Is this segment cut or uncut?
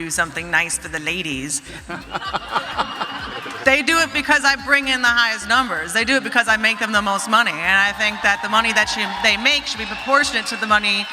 uncut